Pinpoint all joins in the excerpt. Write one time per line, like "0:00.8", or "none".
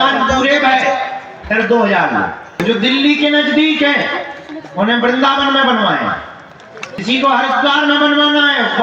0:02.5
0:06.9